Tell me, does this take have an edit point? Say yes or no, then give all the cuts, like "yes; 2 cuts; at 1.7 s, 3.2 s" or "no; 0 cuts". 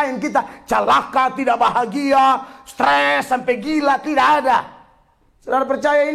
no; 0 cuts